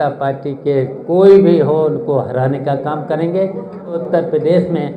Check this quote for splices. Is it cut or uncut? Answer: cut